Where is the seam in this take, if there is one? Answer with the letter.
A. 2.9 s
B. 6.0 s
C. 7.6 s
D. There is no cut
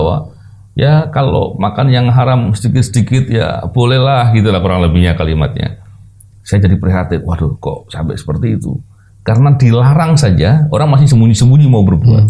D